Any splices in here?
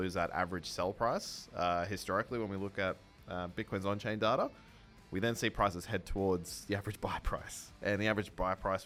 no; 0 cuts

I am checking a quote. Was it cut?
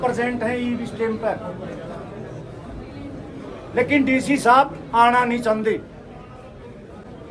no; 0 cuts

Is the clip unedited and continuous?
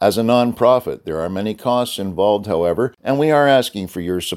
no; 1 cut; at 3.0 s

